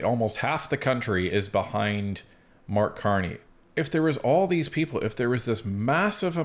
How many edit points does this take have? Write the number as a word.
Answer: one